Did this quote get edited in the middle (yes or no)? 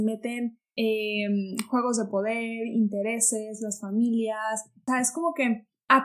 yes